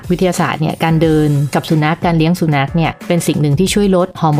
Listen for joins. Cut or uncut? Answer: uncut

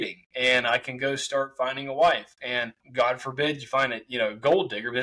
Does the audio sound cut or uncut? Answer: cut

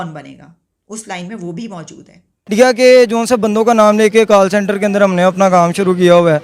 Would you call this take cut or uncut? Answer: cut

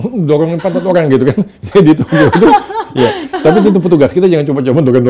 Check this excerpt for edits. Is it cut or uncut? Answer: uncut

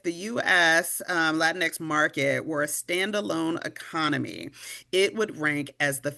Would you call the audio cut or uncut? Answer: uncut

